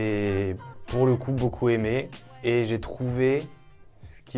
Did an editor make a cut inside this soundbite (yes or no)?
no